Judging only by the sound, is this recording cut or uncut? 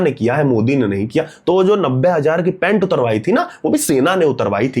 uncut